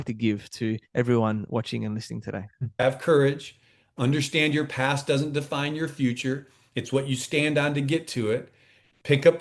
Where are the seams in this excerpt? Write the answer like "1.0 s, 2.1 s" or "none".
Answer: 2.8 s

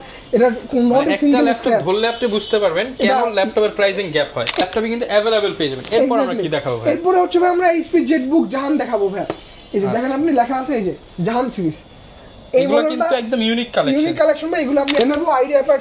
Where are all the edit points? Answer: 4.6 s, 15.0 s

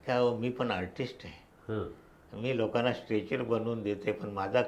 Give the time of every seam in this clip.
none

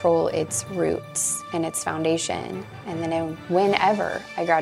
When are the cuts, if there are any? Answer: none

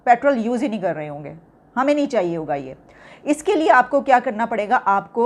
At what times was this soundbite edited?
none

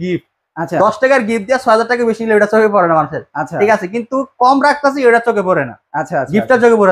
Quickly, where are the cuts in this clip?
none

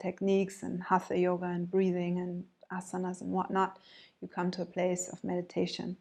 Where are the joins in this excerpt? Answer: none

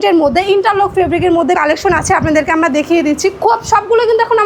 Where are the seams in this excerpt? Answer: 1.6 s

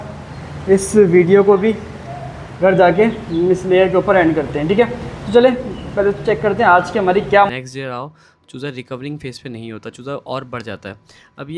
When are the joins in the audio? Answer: 7.5 s

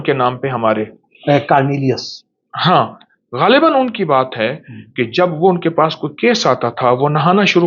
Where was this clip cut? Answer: none

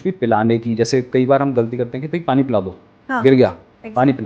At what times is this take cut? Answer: none

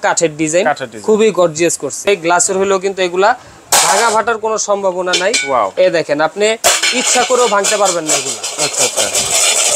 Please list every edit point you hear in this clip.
2.0 s

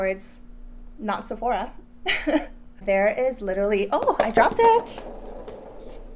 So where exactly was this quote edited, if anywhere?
2.8 s

